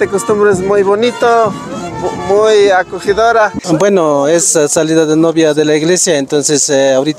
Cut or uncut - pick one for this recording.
cut